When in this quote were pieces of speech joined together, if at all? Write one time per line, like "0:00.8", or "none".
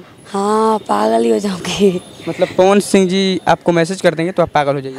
none